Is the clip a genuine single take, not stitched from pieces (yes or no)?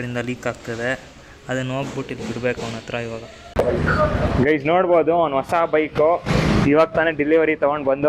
no